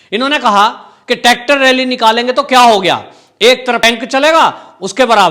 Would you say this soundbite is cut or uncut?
cut